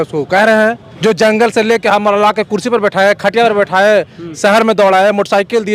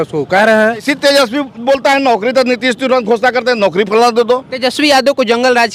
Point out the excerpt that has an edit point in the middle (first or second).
second